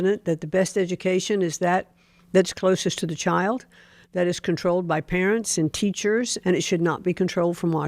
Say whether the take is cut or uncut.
cut